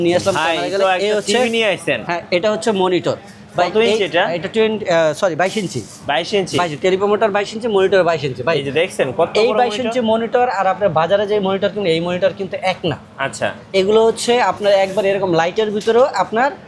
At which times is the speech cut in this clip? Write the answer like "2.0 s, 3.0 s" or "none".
none